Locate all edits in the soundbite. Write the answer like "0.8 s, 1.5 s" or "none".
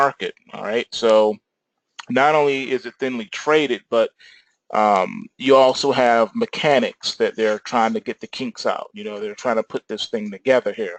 7.0 s